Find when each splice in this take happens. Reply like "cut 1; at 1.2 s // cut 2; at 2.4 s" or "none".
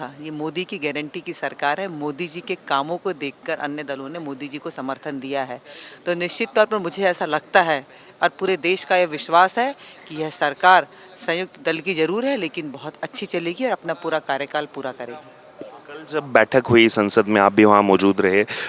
none